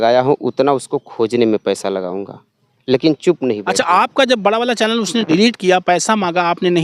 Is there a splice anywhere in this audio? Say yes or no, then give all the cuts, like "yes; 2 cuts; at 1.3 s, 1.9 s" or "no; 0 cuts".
yes; 1 cut; at 3.7 s